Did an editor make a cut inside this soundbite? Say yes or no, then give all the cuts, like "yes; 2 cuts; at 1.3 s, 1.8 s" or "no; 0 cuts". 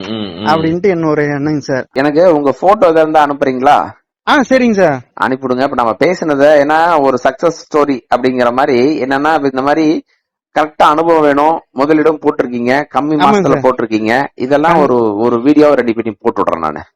yes; 1 cut; at 1.9 s